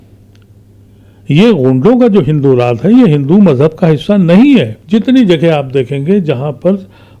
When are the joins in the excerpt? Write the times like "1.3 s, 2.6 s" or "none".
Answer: 4.8 s